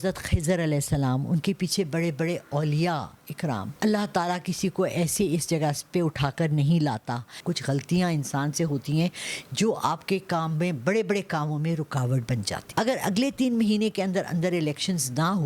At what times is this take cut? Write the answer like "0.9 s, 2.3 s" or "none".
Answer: 3.7 s, 7.4 s, 12.6 s